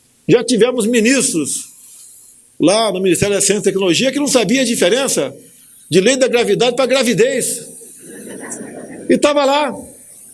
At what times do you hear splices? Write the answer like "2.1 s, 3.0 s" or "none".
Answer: none